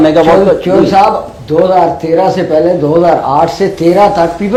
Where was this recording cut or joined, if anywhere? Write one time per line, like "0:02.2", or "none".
none

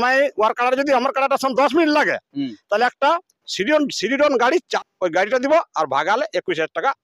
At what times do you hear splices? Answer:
0:04.7

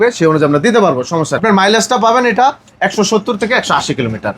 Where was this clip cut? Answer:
0:01.4

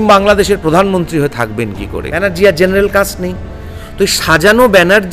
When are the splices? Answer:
0:02.2

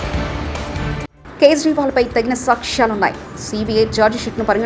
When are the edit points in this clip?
0:01.1

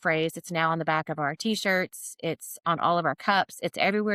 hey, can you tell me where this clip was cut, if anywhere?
none

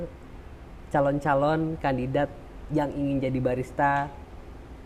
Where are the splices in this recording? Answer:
none

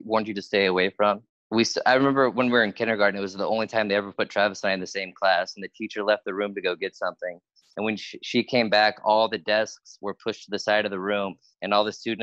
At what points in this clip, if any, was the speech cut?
0:01.3

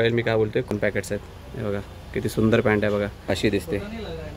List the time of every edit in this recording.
0:00.7
0:03.4

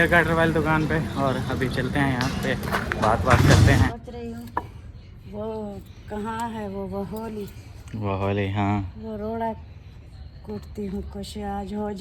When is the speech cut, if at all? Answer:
0:03.9

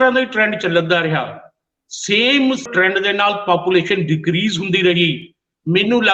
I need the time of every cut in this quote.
0:02.7

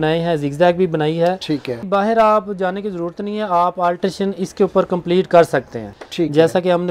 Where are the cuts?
0:01.8
0:06.0

